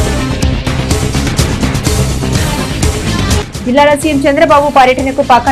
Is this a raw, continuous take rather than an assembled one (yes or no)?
no